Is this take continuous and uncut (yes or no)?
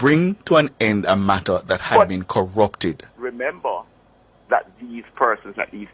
no